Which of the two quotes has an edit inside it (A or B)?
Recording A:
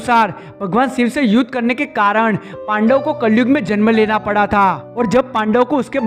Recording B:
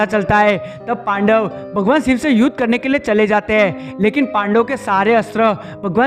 A